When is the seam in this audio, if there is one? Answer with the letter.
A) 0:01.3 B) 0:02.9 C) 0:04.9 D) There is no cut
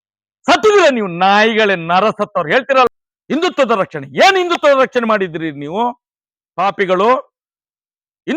B